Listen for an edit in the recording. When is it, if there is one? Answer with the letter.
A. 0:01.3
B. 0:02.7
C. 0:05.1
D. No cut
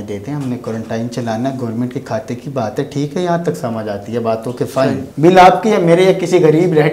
C